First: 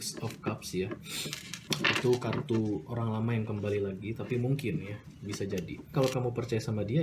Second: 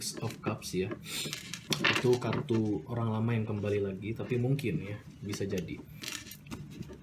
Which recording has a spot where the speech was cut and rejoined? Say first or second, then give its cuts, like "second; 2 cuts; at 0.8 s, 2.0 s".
first; 1 cut; at 5.9 s